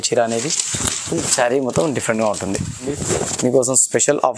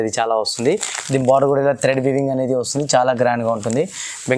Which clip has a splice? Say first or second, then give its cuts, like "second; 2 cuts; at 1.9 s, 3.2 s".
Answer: first; 1 cut; at 2.9 s